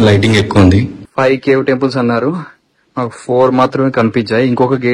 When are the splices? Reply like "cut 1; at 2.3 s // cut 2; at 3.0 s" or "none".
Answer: cut 1; at 1.0 s